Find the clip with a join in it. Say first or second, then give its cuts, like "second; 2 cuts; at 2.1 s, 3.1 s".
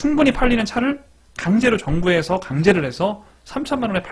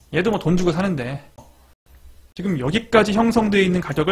second; 1 cut; at 1.6 s